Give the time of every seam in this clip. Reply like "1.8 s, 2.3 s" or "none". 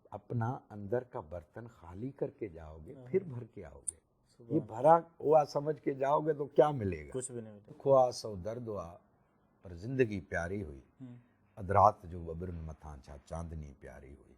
7.8 s